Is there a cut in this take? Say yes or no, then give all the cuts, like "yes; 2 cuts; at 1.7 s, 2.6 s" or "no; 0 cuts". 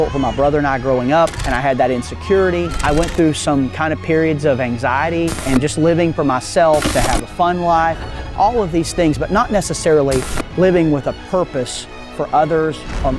yes; 4 cuts; at 1.5 s, 2.8 s, 5.4 s, 6.9 s